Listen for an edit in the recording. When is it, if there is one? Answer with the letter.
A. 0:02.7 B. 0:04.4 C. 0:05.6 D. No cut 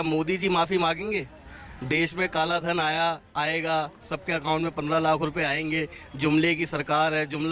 D